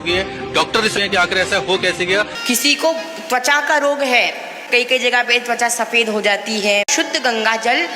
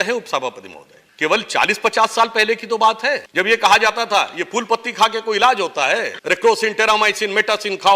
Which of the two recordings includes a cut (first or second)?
first